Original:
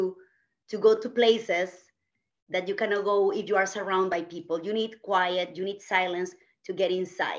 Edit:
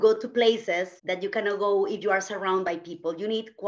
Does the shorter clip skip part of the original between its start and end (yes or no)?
yes